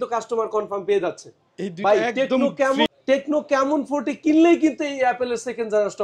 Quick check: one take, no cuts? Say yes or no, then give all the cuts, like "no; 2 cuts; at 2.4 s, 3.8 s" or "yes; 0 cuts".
yes; 0 cuts